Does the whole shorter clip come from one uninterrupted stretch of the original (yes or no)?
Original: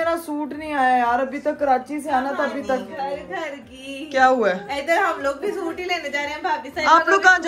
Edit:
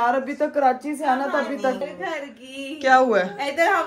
no